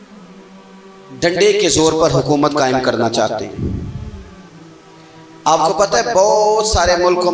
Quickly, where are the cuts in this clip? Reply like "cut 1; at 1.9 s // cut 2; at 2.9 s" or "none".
cut 1; at 1.1 s